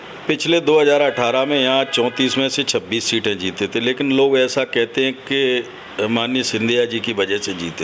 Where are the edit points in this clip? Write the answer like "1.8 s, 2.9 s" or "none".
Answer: none